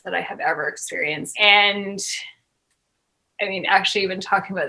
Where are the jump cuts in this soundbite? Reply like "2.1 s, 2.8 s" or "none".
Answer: 1.3 s